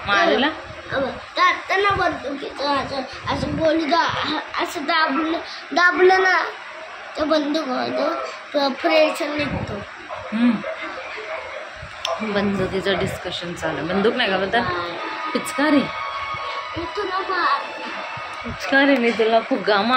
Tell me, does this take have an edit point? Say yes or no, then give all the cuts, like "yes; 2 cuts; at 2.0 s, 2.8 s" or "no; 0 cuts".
no; 0 cuts